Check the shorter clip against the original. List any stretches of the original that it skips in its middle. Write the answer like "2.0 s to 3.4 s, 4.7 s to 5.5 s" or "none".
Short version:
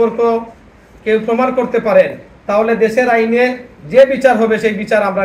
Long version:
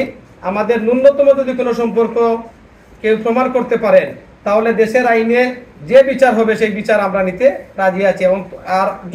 none